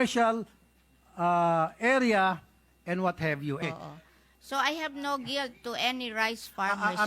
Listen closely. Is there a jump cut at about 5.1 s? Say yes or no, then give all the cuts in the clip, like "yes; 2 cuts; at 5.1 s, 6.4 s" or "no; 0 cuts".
no; 1 cut; at 3.6 s